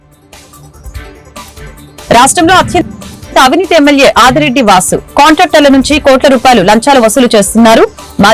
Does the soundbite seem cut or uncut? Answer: uncut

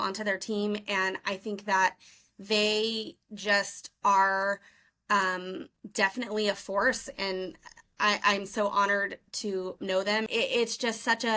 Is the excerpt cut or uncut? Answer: cut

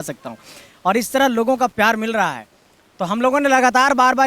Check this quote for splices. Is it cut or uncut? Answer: uncut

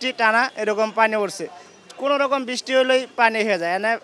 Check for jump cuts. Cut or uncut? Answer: uncut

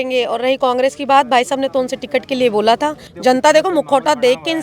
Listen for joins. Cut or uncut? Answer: cut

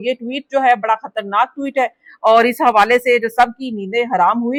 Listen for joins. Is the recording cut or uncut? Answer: uncut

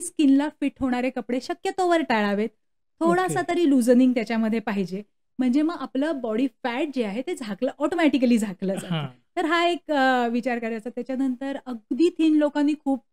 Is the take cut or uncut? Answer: uncut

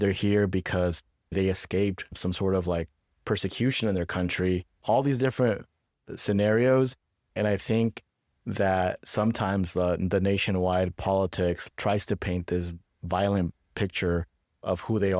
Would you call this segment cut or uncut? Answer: cut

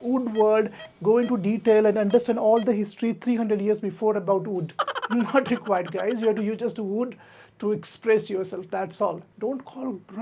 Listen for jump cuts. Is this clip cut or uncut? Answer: cut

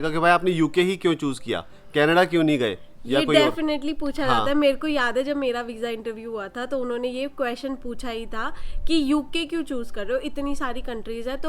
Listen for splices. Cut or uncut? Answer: uncut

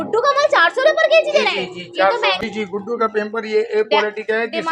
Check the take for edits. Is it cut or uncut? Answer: cut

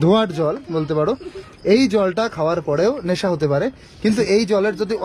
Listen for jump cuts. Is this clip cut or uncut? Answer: uncut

